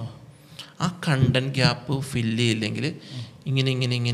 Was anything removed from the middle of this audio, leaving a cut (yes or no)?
no